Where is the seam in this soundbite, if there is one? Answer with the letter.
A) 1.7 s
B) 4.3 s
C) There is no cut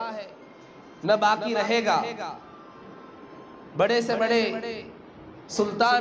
C